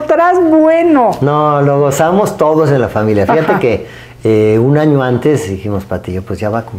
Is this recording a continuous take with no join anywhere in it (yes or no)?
yes